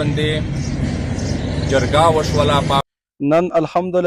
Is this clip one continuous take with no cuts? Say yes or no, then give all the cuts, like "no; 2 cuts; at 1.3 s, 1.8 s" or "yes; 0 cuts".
no; 1 cut; at 2.8 s